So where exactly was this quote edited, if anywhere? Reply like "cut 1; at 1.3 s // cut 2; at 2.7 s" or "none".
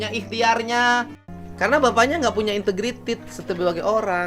cut 1; at 1.2 s